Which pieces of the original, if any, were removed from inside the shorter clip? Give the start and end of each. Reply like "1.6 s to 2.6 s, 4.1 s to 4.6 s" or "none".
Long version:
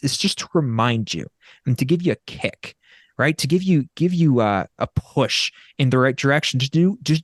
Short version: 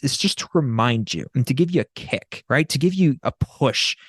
1.2 s to 1.5 s, 2.6 s to 3.0 s, 3.9 s to 4.8 s

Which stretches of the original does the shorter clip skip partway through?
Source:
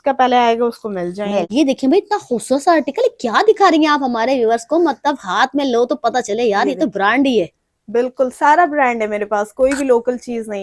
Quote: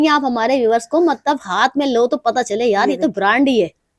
none

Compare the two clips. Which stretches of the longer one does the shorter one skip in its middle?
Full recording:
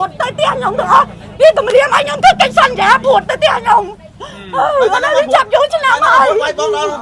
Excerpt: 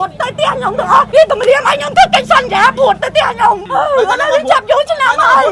1.1 s to 1.3 s, 3.9 s to 4.5 s

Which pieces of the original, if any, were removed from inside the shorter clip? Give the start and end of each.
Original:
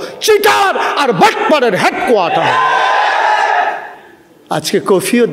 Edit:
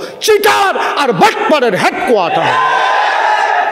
none

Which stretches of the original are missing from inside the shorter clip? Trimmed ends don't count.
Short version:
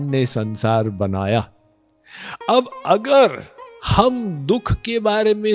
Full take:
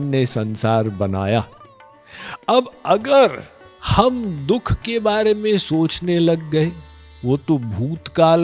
none

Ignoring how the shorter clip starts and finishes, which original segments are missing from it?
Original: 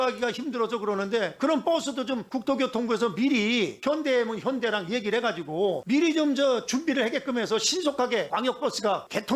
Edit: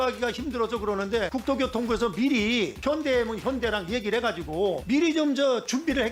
1.3 s to 2.3 s

